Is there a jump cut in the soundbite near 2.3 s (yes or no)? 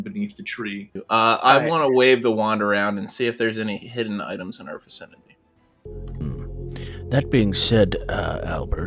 no